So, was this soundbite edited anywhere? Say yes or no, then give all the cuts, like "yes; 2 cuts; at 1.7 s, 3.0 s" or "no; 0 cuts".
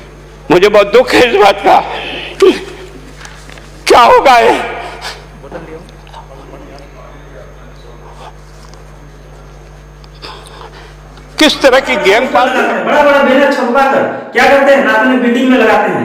yes; 1 cut; at 12.5 s